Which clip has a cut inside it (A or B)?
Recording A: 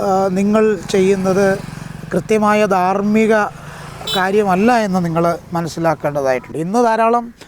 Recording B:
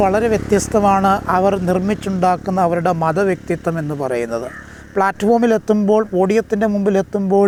A